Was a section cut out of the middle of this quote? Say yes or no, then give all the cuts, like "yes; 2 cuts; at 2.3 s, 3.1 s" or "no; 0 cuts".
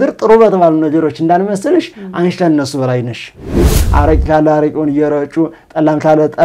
yes; 1 cut; at 3.8 s